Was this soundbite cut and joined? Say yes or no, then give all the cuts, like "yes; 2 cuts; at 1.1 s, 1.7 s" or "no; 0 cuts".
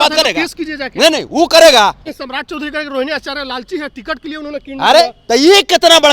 yes; 1 cut; at 2.1 s